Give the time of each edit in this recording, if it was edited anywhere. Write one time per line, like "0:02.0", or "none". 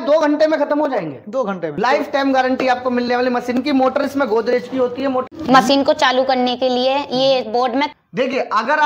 0:01.7
0:05.4
0:07.9